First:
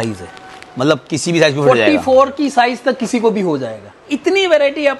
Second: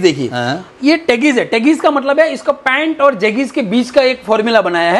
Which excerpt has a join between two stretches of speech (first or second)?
first